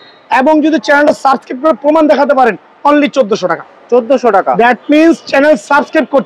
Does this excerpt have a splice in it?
no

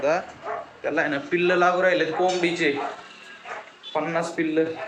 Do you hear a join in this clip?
no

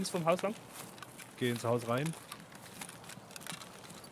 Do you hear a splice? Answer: no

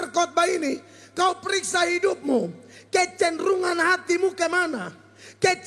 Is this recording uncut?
yes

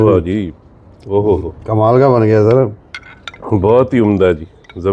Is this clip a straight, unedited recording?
yes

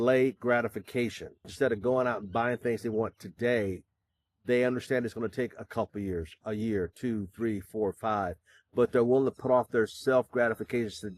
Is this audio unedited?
no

